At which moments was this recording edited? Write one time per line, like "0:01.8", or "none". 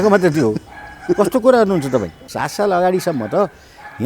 0:02.2